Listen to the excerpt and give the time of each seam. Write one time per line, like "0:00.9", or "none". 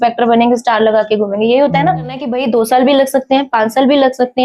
0:02.3